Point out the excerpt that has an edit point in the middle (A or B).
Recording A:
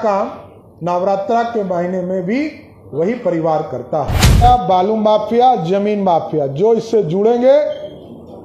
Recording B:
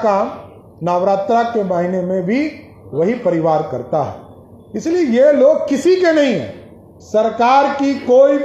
A